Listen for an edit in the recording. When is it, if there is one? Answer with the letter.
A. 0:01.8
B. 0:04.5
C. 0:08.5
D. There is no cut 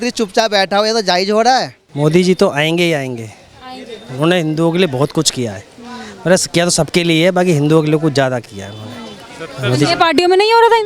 A